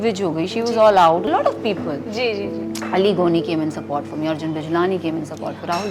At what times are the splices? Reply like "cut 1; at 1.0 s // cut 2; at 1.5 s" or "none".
cut 1; at 1.3 s